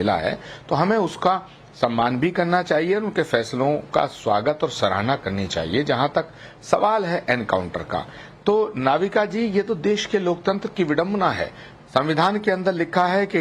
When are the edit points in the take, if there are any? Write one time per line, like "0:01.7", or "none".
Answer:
none